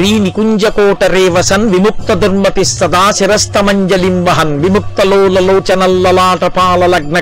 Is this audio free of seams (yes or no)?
yes